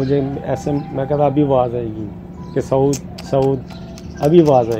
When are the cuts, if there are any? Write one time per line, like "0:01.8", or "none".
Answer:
none

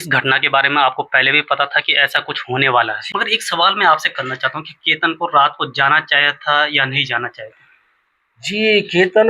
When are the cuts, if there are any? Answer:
0:03.0

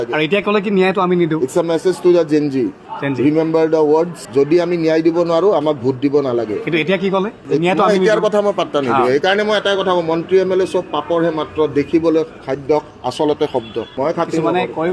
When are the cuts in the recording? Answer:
0:13.9

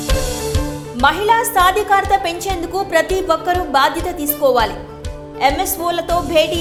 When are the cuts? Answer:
none

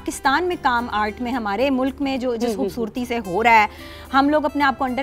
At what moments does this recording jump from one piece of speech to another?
none

